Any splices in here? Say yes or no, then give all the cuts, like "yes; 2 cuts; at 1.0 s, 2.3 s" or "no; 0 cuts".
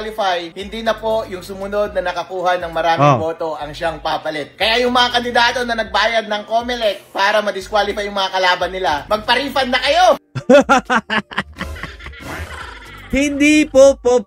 no; 0 cuts